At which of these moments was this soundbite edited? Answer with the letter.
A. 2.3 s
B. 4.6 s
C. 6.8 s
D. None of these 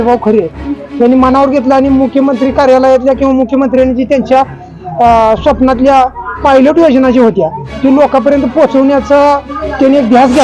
D